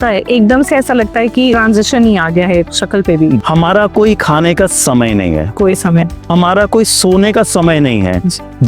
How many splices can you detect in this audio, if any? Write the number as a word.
two